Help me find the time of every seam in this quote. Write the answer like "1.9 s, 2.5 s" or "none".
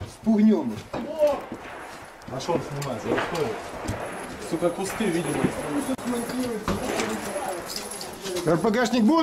1.8 s